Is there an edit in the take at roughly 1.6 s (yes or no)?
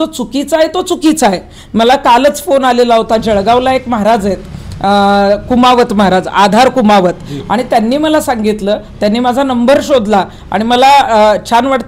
no